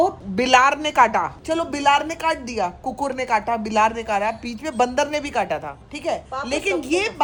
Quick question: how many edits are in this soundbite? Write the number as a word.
zero